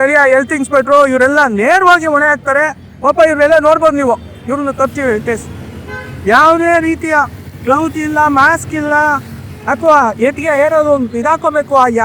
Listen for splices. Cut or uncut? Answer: uncut